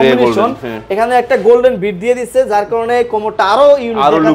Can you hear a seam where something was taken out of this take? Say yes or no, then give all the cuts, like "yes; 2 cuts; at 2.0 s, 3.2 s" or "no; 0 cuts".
no; 0 cuts